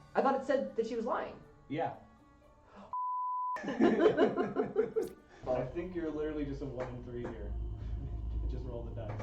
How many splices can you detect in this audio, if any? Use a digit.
1